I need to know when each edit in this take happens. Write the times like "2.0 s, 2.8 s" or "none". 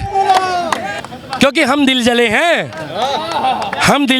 0.9 s